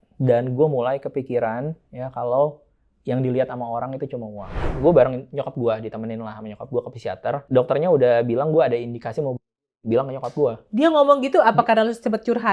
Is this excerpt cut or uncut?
cut